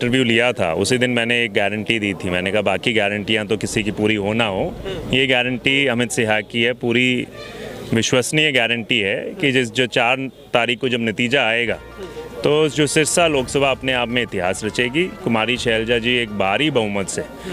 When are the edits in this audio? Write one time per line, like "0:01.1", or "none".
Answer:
none